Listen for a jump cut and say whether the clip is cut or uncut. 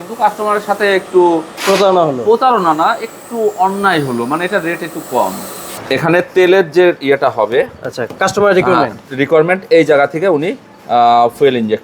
cut